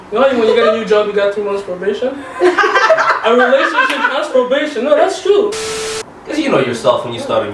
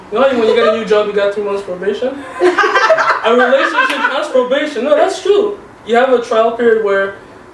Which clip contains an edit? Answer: first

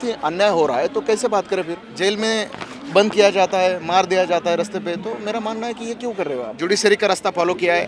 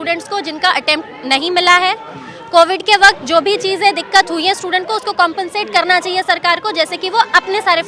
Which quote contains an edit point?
first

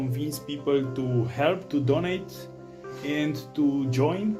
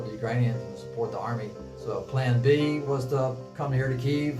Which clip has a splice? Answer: second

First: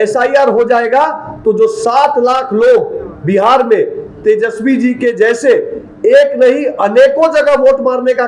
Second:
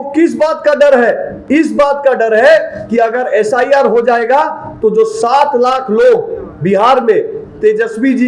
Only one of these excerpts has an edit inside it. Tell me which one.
second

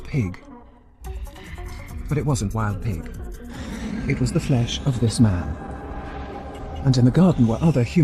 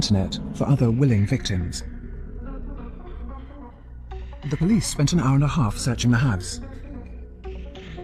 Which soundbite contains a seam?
second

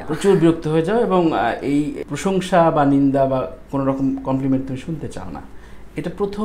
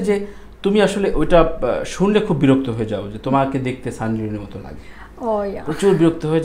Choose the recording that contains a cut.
first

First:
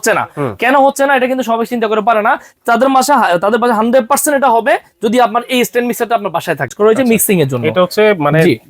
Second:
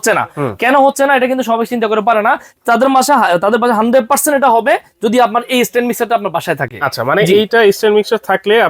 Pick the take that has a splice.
first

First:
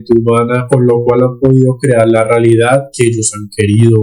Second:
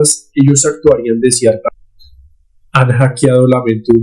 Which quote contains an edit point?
second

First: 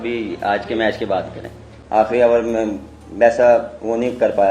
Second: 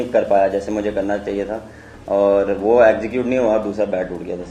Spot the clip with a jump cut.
first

